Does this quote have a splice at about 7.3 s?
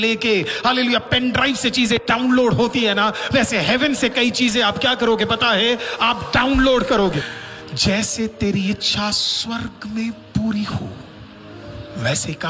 yes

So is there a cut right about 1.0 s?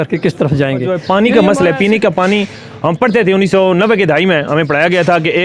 yes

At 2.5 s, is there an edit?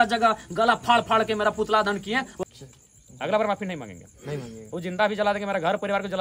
yes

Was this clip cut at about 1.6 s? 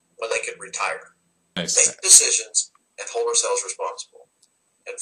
yes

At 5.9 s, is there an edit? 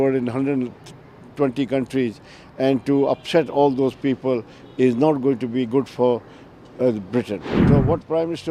no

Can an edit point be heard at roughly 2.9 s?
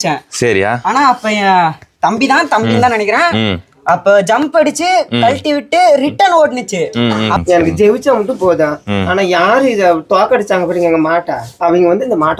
no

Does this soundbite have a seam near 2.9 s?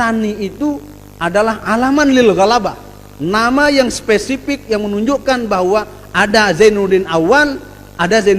no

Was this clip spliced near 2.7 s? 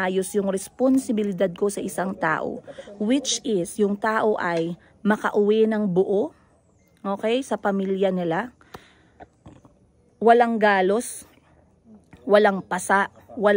no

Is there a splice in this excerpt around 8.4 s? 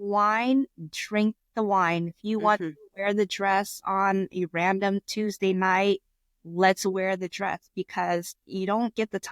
yes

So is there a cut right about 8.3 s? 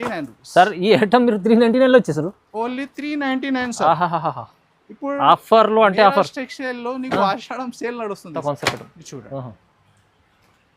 yes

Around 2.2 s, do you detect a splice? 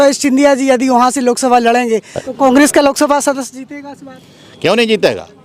yes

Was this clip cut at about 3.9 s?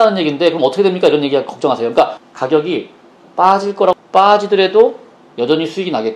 yes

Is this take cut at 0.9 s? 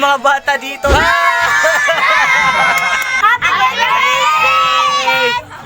yes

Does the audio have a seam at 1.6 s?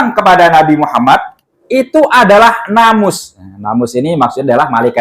yes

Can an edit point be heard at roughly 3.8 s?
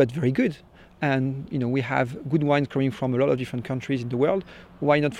no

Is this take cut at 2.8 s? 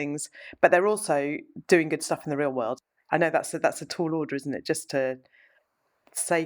yes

